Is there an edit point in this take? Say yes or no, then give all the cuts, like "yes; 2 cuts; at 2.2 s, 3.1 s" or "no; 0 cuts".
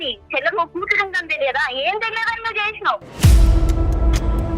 yes; 1 cut; at 3.1 s